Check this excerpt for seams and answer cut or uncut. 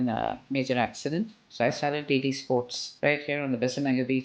cut